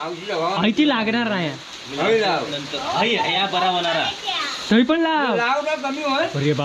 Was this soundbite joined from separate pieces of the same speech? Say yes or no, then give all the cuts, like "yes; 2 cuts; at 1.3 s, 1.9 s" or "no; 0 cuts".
no; 0 cuts